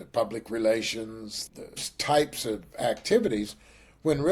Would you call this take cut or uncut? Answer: cut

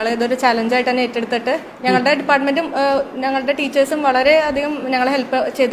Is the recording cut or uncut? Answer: uncut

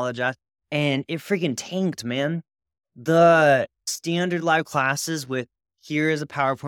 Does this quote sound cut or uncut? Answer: cut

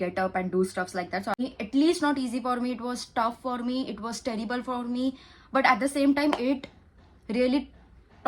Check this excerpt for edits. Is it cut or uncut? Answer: cut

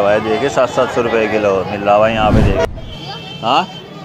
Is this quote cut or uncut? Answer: cut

